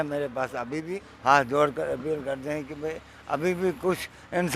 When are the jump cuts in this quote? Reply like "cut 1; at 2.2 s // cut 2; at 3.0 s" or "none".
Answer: cut 1; at 1.0 s